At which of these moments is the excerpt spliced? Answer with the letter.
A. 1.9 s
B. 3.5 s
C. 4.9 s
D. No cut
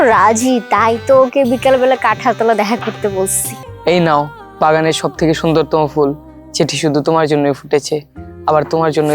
B